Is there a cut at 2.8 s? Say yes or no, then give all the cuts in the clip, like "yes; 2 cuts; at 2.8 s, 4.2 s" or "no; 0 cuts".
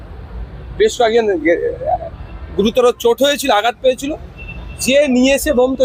no; 0 cuts